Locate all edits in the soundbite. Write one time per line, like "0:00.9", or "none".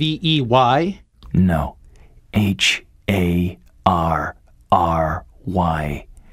0:01.0